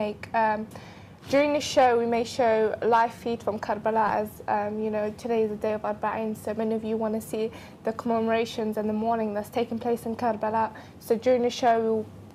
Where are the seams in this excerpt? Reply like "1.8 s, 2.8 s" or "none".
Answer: none

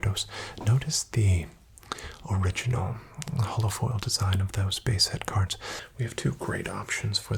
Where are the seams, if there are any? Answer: 5.8 s

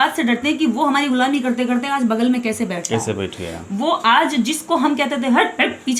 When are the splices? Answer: none

